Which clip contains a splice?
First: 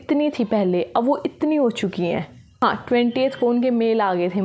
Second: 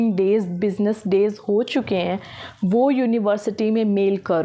first; 1 cut; at 2.4 s

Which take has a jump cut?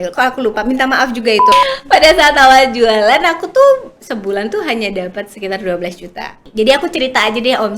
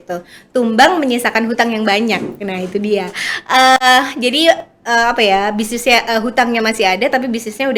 first; 2 cuts; at 1.5 s, 6.5 s

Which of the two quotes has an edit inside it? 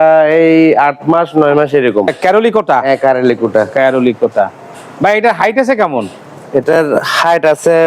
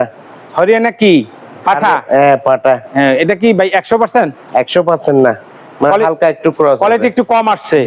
first; 1 cut; at 2.1 s

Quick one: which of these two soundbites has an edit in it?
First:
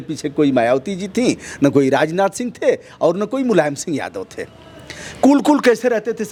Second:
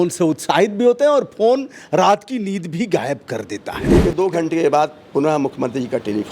second; 1 cut; at 4.1 s

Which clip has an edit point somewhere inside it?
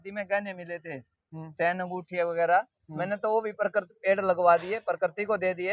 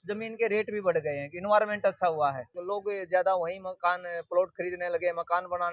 second; 1 cut; at 2.5 s

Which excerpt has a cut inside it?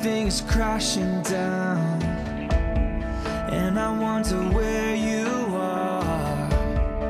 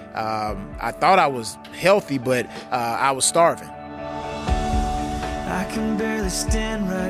second; 1 cut; at 3.6 s

